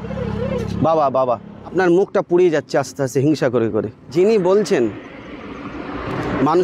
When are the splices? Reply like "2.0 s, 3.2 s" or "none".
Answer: 1.6 s, 4.0 s